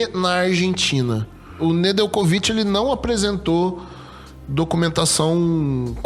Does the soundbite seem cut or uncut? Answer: cut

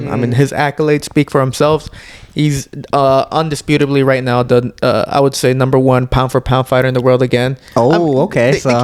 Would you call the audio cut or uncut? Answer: uncut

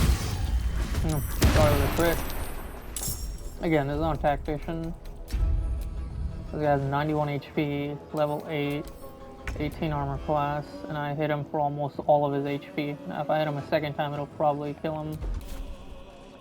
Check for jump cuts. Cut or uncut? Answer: cut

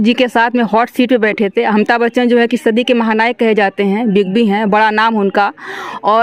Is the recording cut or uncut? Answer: uncut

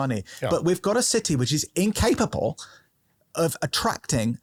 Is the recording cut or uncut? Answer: uncut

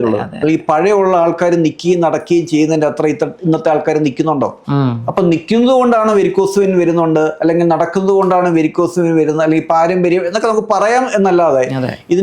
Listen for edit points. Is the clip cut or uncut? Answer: uncut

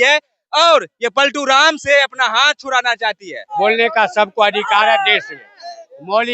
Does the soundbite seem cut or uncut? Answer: cut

